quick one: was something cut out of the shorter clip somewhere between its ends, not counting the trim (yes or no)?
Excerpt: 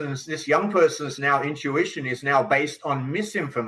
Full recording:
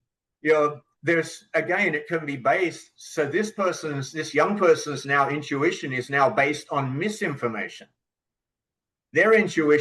no